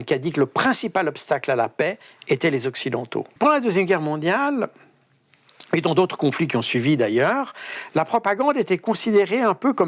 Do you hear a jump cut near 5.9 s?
no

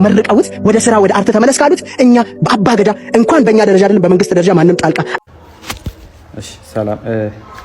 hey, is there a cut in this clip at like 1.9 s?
no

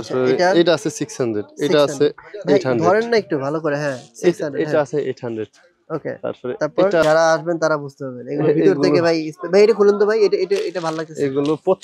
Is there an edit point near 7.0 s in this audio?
yes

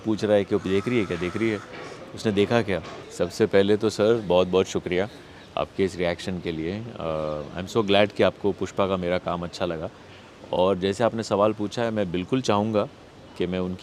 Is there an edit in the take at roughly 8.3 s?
no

